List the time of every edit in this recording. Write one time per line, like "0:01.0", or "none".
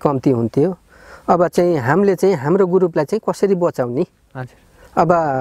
none